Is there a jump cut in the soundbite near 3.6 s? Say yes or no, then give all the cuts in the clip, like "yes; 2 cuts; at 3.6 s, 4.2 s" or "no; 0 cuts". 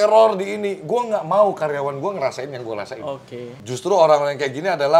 yes; 1 cut; at 3.6 s